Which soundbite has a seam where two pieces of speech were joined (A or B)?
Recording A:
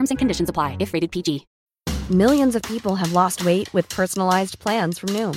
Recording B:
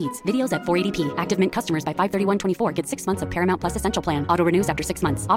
A